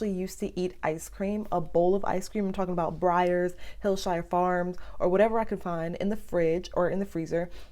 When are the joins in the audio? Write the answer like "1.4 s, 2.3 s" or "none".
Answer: none